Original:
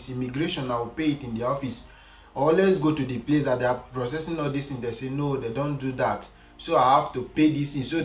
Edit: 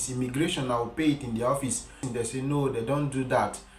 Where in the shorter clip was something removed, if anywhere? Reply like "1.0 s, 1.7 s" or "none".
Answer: 2.0 s